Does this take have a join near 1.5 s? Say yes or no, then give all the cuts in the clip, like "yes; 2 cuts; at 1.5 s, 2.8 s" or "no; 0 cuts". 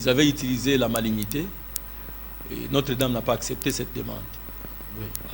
no; 0 cuts